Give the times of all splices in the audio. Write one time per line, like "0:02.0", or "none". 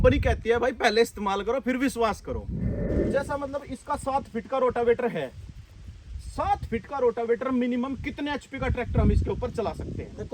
0:02.9